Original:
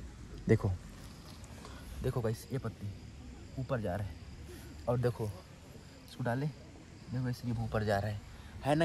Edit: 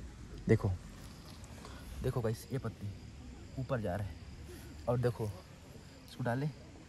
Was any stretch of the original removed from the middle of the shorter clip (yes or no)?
no